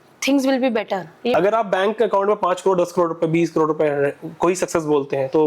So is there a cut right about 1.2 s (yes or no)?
yes